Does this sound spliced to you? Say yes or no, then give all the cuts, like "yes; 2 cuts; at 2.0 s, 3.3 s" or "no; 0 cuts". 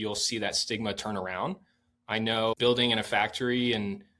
yes; 1 cut; at 2.5 s